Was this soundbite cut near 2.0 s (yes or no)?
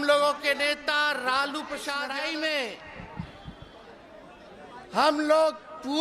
yes